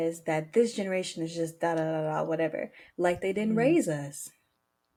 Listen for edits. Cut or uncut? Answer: uncut